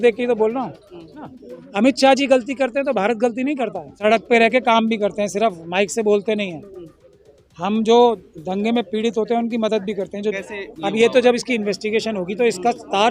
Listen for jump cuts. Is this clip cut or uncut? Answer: cut